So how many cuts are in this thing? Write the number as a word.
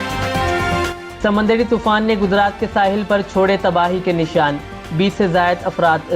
one